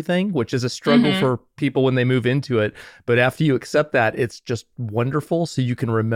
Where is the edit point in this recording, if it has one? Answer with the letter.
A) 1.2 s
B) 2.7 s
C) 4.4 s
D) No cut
D